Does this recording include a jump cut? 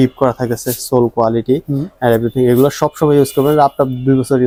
no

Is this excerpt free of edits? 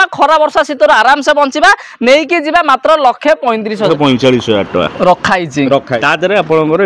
no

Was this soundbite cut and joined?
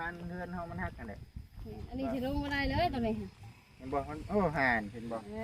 no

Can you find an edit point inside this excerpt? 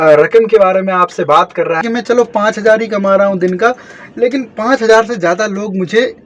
yes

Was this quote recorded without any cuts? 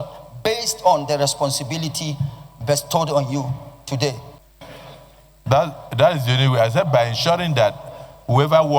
no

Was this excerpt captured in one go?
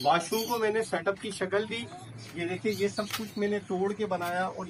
yes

